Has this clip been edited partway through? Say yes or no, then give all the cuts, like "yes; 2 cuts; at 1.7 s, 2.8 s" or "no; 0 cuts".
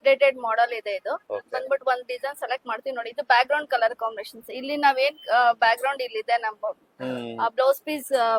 no; 0 cuts